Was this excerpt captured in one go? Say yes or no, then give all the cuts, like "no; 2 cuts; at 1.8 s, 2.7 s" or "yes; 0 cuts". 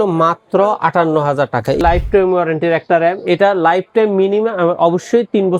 no; 1 cut; at 1.8 s